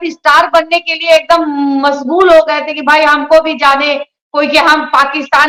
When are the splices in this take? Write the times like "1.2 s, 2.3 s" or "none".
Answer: none

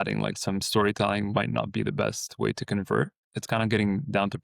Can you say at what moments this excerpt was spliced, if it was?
3.2 s

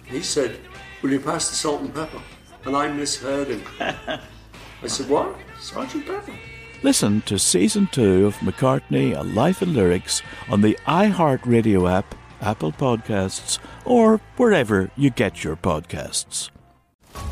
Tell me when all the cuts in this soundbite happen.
none

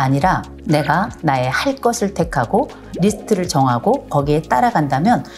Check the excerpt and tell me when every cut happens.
1.1 s, 2.9 s

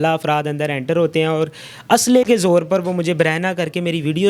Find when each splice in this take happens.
none

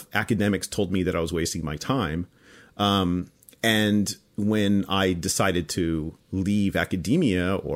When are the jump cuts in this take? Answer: none

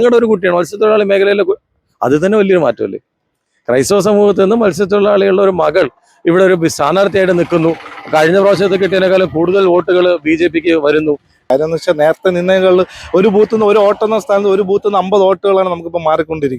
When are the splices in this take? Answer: 11.4 s

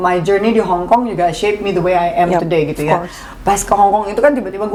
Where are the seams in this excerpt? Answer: none

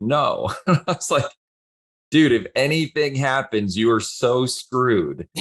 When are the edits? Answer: none

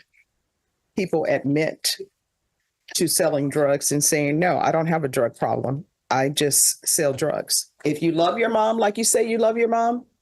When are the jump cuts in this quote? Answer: 7.7 s

